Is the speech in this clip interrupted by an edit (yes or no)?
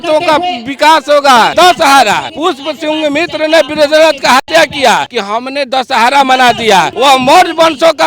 yes